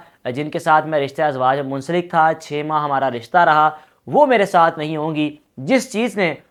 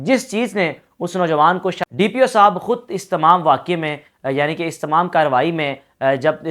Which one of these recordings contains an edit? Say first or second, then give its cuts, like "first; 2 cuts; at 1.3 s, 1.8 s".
second; 1 cut; at 1.8 s